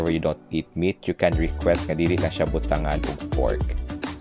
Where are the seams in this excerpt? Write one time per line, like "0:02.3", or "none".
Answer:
none